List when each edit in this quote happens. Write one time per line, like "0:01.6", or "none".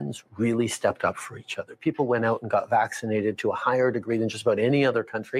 0:01.3

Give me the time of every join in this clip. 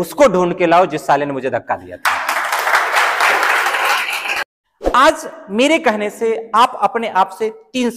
0:04.3

